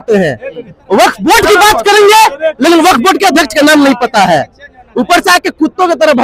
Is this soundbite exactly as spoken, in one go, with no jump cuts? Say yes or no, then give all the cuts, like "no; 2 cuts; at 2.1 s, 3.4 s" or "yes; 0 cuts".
yes; 0 cuts